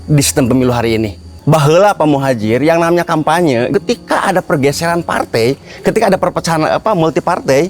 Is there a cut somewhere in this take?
yes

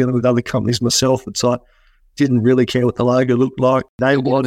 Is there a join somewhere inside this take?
no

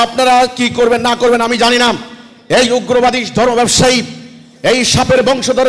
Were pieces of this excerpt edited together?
no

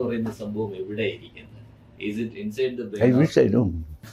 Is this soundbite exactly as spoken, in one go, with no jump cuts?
yes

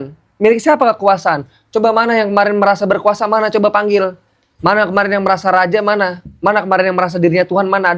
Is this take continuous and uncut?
yes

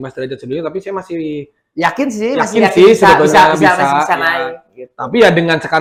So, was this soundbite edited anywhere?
no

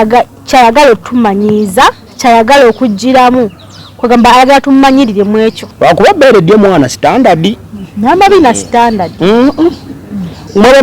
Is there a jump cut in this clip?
yes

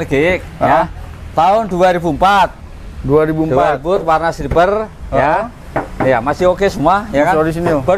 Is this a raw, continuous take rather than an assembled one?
yes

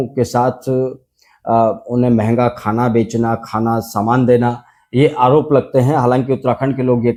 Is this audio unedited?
yes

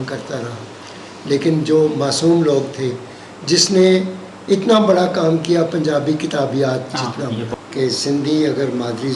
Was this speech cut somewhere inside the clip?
yes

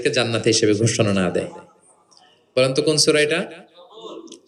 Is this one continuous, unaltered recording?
yes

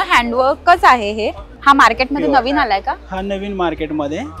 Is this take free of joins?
no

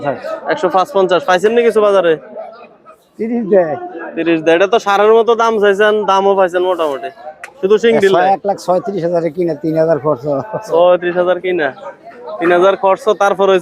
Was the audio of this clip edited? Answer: no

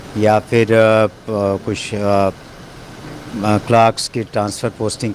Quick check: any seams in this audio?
no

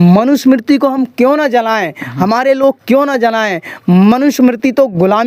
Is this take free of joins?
yes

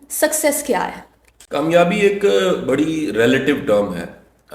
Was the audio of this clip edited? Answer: no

